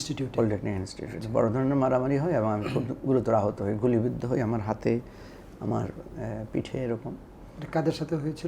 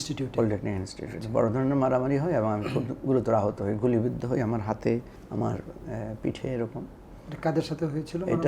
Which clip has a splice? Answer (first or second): second